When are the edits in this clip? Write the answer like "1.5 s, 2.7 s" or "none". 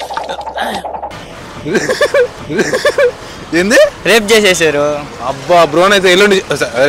none